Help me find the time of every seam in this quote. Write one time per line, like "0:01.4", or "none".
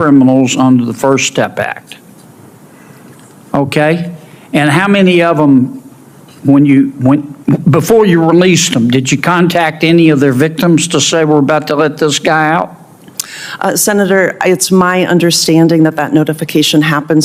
none